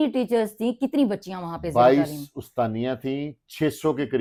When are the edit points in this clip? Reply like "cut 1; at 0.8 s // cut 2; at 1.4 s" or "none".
none

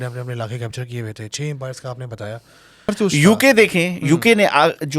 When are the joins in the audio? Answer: cut 1; at 2.9 s

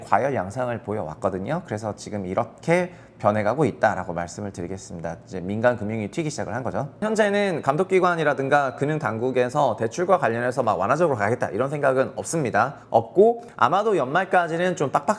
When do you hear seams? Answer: cut 1; at 7.0 s // cut 2; at 12.8 s // cut 3; at 13.5 s

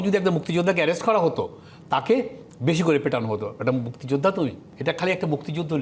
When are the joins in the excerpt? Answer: cut 1; at 4.7 s

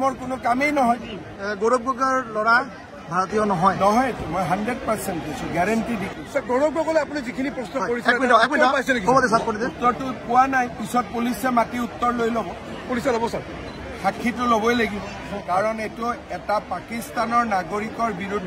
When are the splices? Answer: none

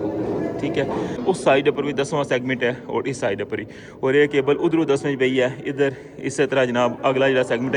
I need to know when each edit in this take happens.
cut 1; at 1.2 s

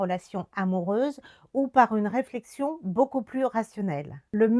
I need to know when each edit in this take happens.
none

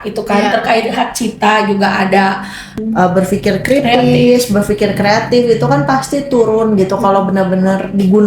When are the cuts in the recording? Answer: cut 1; at 2.8 s

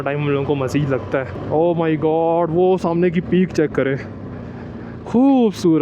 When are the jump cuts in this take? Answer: cut 1; at 1.4 s

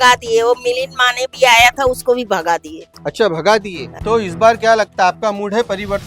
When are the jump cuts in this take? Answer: cut 1; at 3.8 s

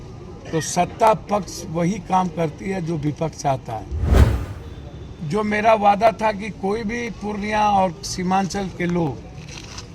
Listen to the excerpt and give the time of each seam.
cut 1; at 4.2 s

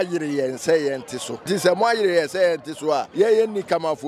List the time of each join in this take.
cut 1; at 1.3 s // cut 2; at 3.1 s

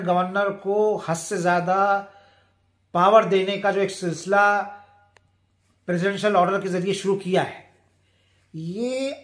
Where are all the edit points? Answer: none

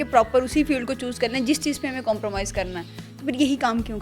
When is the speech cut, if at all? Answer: none

